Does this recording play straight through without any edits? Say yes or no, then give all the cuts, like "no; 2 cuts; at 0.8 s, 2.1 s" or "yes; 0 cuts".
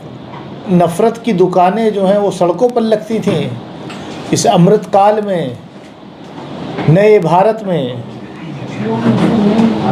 yes; 0 cuts